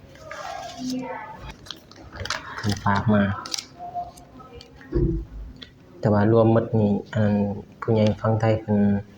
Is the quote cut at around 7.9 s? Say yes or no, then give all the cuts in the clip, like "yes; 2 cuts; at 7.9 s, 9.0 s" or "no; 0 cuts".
no; 1 cut; at 1.5 s